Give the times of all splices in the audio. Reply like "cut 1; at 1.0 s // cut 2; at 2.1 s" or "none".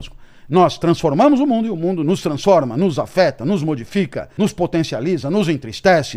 cut 1; at 4.2 s